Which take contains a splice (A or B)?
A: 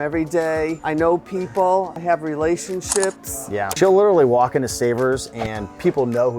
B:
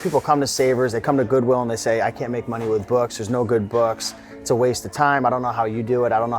A